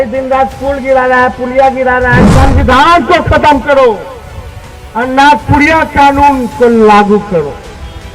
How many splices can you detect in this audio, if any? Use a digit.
1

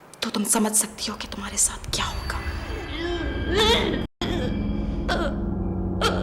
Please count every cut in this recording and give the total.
0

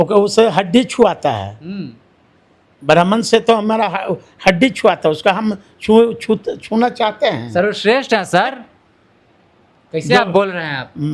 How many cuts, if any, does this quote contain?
0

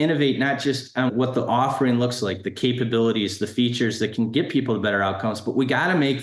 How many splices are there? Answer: 1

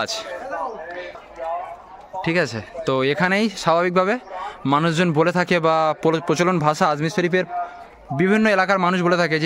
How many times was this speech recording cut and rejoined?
1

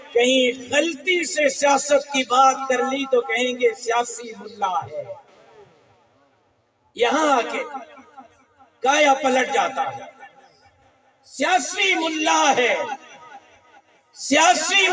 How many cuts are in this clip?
0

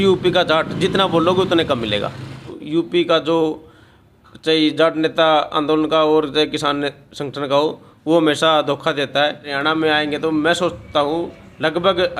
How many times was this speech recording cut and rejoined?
2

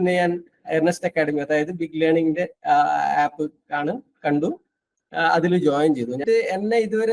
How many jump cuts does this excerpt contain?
1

